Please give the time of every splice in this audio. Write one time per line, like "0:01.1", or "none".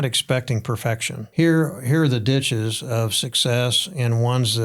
0:01.2